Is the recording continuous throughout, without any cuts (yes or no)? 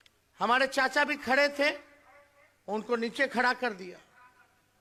yes